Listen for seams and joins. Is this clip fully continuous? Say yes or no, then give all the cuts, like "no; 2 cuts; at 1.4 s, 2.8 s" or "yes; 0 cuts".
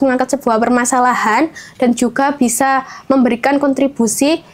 yes; 0 cuts